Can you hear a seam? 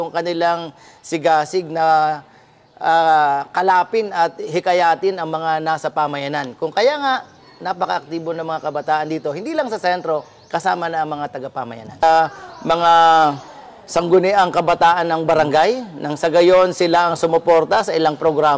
yes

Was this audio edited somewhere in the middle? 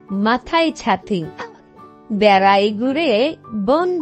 no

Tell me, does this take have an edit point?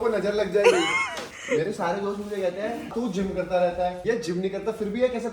yes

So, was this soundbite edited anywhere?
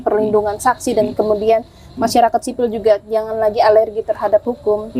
no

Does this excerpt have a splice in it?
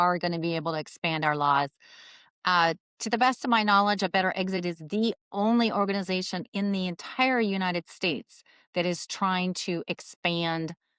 no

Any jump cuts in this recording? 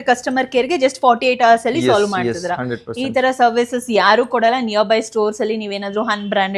no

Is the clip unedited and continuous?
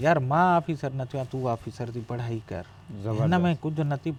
yes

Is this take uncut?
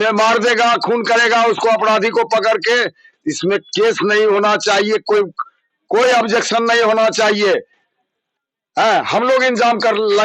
yes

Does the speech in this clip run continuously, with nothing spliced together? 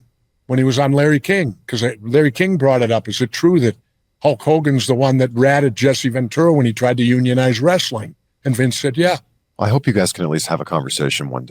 no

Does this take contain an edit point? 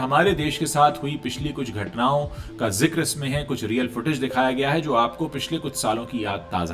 no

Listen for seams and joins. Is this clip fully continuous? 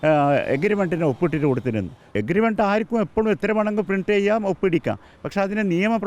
no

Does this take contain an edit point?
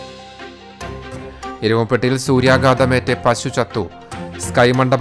no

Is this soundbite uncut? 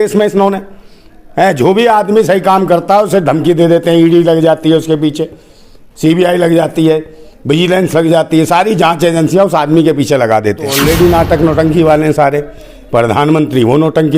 no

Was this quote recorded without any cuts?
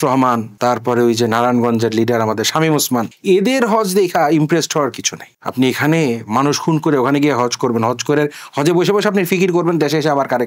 yes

